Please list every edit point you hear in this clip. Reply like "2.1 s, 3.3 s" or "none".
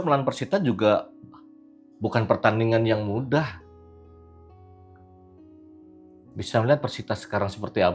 none